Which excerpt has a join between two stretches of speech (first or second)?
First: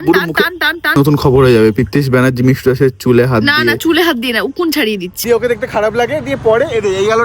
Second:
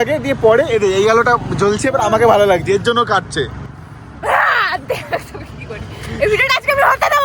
first